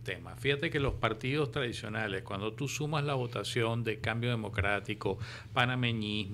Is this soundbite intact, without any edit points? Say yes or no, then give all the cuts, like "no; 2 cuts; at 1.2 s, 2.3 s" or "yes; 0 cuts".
yes; 0 cuts